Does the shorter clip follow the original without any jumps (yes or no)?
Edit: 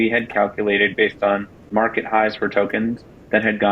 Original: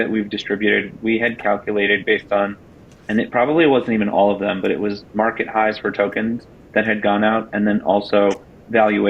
no